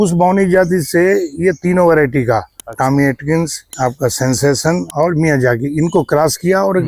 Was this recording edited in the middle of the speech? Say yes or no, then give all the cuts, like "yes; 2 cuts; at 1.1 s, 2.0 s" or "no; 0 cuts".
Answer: yes; 2 cuts; at 3.6 s, 4.9 s